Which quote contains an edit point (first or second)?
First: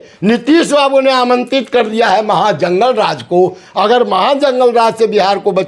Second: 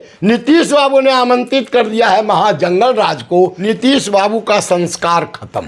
second